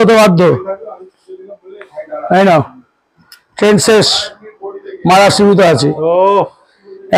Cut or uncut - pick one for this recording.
uncut